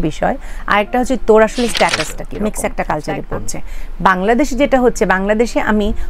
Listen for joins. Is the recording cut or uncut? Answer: cut